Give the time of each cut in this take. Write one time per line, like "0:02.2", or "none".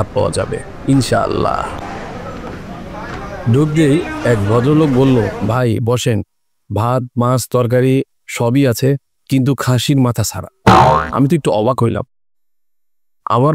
0:01.7